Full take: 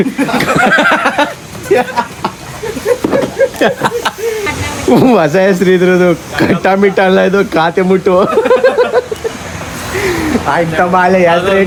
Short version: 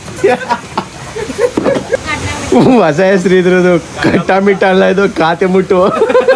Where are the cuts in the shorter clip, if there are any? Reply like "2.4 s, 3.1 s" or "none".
2.0 s